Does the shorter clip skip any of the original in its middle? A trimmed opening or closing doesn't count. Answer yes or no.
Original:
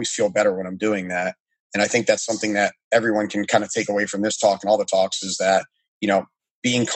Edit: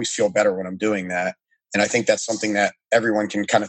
no